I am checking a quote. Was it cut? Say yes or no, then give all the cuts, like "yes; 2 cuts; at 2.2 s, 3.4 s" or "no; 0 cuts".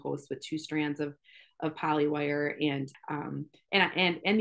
yes; 1 cut; at 2.9 s